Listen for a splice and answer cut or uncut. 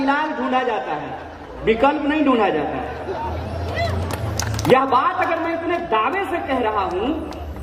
uncut